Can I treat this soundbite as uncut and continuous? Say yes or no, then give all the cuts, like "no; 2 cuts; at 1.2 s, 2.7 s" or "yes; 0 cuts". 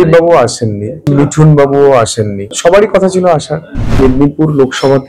no; 3 cuts; at 1.0 s, 2.4 s, 4.0 s